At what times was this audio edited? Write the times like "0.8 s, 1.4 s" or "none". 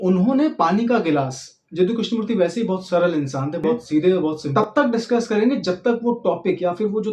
4.4 s